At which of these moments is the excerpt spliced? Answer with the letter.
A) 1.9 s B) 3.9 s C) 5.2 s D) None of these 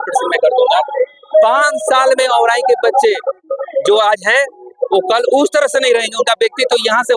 D